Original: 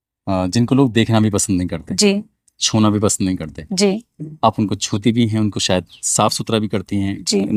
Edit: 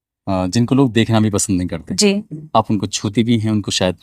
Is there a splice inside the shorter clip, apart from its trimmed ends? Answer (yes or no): yes